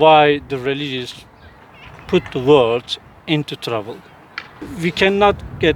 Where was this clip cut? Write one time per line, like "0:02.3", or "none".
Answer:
0:04.7